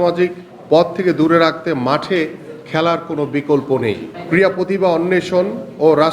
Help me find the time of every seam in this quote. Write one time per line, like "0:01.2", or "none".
0:04.1